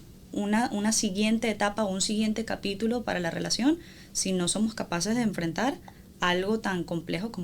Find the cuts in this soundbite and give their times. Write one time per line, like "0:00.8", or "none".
none